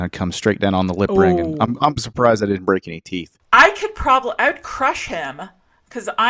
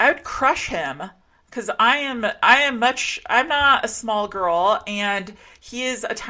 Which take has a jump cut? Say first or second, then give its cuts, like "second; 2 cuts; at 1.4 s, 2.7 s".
first; 1 cut; at 3.3 s